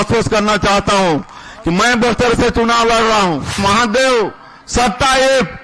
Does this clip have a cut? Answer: yes; 1 cut; at 3.6 s

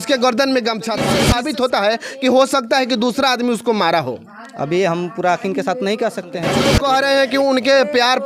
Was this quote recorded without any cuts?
no; 2 cuts; at 1.2 s, 6.6 s

